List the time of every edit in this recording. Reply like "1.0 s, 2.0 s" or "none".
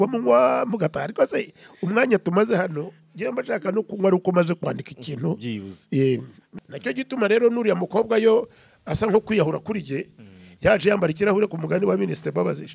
6.4 s